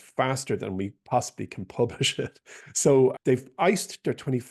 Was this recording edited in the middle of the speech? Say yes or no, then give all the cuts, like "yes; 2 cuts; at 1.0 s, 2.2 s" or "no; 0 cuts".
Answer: yes; 1 cut; at 3.1 s